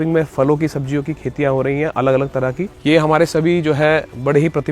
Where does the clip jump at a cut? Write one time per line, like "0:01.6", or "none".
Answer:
0:02.7

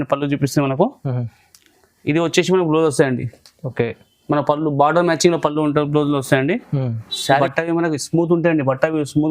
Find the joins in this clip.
0:07.4

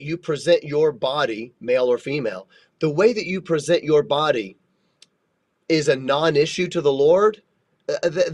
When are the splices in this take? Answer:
none

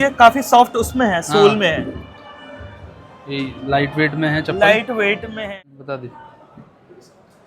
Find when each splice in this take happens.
0:05.3

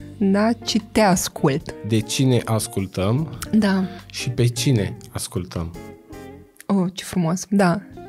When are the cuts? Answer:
0:01.7

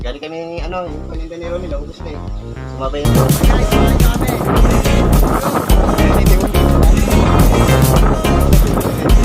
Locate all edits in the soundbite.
0:03.1

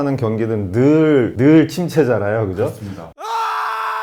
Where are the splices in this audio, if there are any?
none

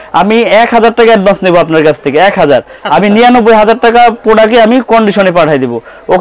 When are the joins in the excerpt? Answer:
none

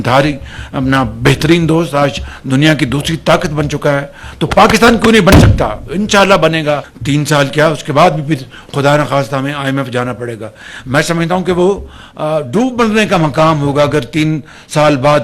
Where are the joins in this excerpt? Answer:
0:06.9

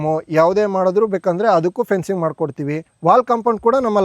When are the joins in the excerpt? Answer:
0:02.9

